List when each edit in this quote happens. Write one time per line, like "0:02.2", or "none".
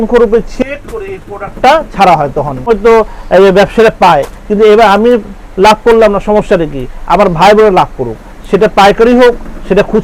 0:02.7